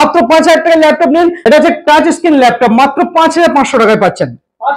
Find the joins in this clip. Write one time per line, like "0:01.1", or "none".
0:01.4